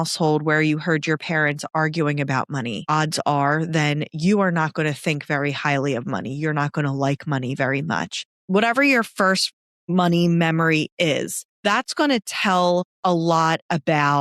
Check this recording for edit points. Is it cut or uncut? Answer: cut